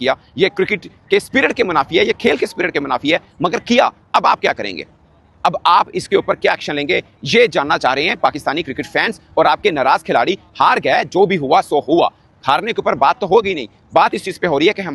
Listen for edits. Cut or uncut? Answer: uncut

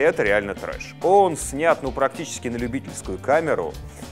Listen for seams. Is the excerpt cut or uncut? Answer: cut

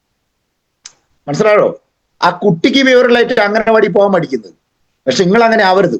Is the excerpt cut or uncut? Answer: uncut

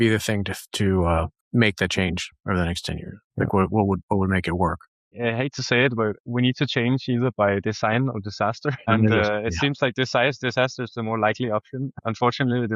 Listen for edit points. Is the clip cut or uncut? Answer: cut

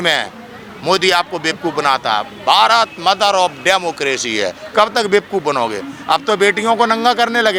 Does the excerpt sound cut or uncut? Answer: uncut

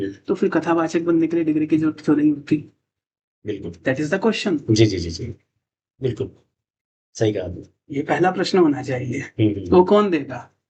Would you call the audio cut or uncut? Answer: uncut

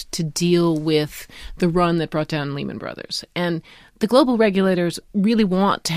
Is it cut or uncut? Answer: uncut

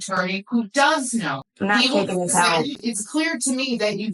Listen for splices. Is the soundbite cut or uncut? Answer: cut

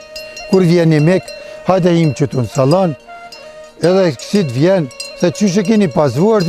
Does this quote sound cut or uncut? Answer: uncut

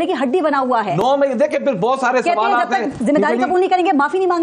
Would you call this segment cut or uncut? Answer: uncut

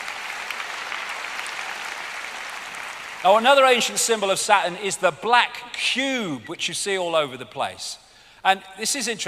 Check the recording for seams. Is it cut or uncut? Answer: uncut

